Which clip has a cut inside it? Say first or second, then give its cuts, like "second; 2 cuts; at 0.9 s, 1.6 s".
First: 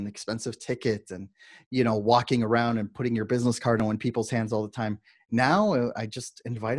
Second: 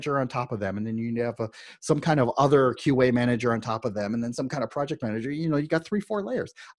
first; 1 cut; at 3.8 s